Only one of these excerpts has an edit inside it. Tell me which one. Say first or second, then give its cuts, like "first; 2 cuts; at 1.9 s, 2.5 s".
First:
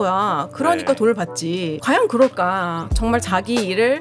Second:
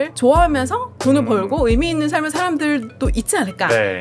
first; 2 cuts; at 1.8 s, 2.9 s